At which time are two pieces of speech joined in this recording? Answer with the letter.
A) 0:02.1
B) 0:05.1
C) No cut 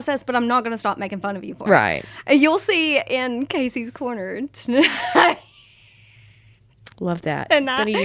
C